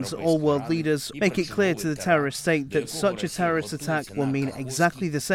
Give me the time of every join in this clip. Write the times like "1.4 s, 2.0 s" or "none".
1.1 s, 4.1 s

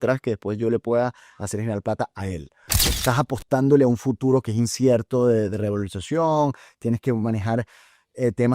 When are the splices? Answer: 2.9 s

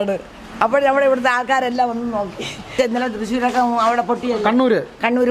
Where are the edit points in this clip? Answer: 2.8 s

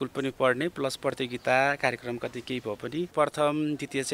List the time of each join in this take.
3.1 s

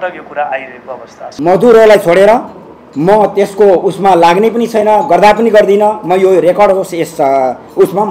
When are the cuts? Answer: 1.3 s

